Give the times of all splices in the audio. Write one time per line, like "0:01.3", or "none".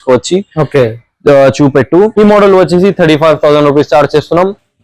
0:02.1